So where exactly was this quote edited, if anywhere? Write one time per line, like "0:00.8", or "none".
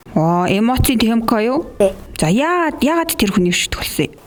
none